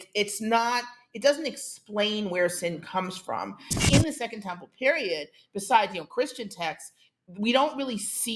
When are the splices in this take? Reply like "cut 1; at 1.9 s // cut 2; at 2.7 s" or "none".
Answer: cut 1; at 3.8 s